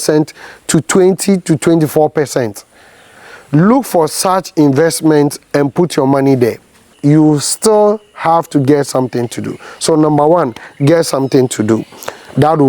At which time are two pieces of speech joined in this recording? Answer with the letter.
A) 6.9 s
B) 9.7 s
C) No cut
A